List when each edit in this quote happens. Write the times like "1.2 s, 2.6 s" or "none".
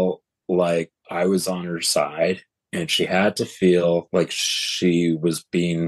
1.0 s, 4.1 s